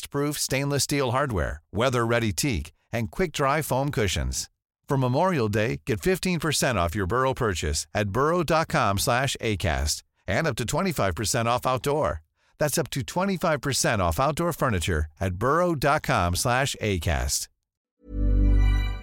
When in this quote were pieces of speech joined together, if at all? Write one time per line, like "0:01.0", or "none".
0:17.9